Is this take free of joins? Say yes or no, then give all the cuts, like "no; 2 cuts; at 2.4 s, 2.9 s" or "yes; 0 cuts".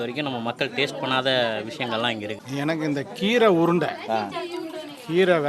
no; 1 cut; at 2.4 s